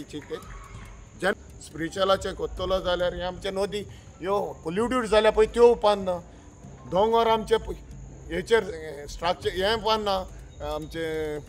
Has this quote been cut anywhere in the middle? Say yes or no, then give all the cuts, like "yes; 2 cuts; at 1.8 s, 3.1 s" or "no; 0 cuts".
yes; 1 cut; at 1.4 s